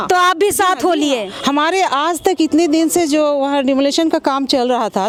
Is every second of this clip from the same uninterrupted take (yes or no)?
yes